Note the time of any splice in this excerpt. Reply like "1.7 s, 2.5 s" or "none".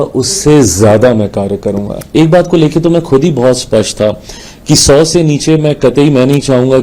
2.0 s